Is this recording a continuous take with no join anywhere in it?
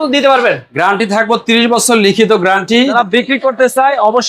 no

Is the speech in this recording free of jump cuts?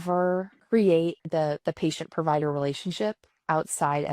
no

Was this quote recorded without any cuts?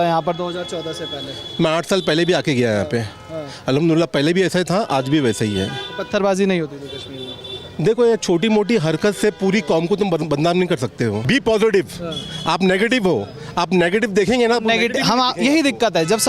no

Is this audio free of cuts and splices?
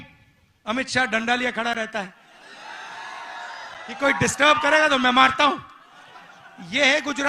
yes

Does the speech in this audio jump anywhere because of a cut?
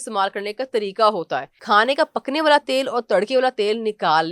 yes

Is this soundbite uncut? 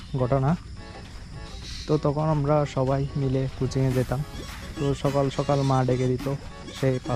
yes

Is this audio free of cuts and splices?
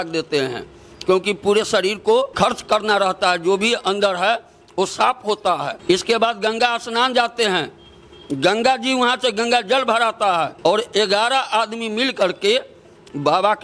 no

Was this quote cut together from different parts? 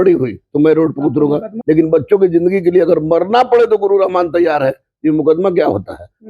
yes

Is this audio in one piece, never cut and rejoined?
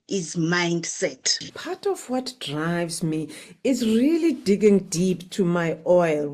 no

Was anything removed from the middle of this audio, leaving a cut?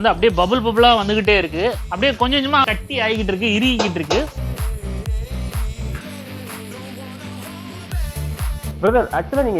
no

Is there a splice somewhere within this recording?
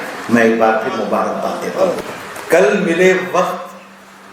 yes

